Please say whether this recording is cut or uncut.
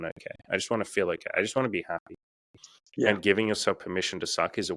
uncut